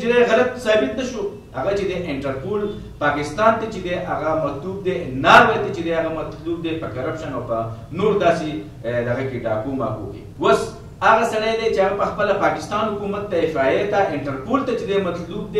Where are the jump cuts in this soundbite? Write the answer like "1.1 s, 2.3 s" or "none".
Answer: 1.4 s, 10.2 s